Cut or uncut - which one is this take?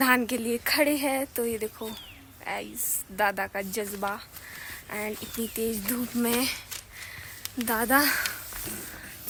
uncut